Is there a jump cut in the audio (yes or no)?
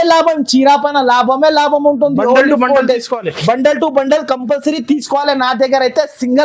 no